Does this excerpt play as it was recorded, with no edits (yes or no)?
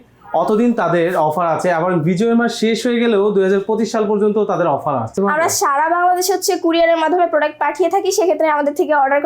no